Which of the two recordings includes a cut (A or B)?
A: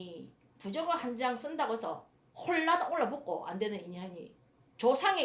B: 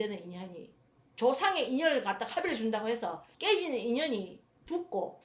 B